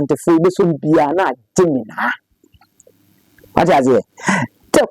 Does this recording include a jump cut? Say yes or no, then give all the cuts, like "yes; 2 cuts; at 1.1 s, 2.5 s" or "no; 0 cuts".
no; 0 cuts